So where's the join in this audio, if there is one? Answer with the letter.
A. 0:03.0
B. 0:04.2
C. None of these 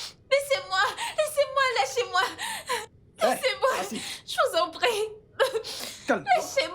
A